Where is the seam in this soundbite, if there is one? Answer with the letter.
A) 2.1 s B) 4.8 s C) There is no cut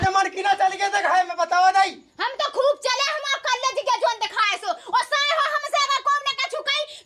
C